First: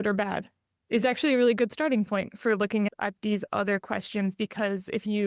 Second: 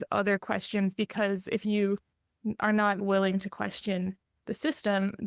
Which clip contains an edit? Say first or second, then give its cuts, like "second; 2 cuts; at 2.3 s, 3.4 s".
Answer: second; 1 cut; at 3.0 s